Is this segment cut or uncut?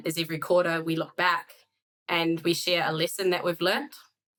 uncut